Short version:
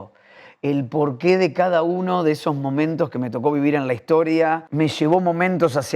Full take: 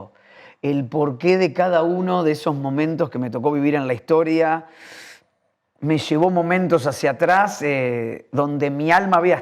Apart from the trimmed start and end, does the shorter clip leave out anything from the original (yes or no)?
yes